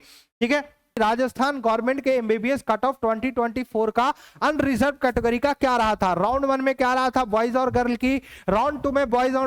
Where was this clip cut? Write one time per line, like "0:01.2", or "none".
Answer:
0:01.0